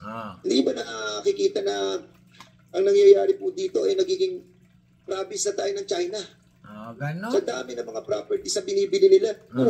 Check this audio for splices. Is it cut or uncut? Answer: cut